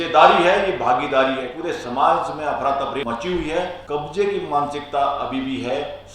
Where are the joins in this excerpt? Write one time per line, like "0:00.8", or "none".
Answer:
0:01.5
0:03.0
0:03.8